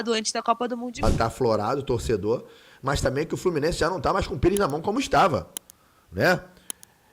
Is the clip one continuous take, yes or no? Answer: no